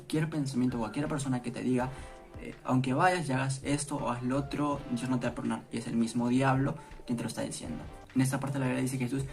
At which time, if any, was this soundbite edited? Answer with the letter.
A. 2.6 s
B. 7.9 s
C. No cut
B